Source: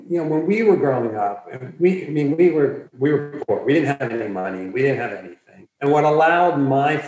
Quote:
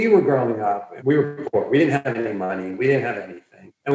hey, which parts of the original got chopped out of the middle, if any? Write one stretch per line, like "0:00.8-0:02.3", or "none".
0:01.5-0:02.9